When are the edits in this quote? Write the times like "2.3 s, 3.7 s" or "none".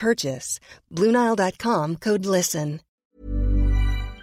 2.9 s

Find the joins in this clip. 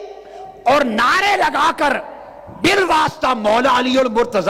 none

